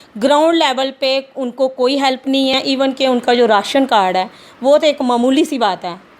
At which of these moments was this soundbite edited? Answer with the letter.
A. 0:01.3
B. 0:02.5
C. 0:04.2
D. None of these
B